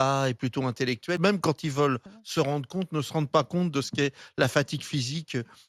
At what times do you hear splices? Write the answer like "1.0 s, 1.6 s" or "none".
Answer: 1.2 s